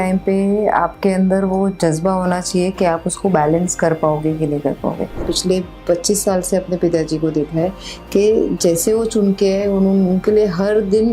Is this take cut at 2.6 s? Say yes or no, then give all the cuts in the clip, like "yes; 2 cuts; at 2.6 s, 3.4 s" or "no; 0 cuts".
no; 1 cut; at 5.3 s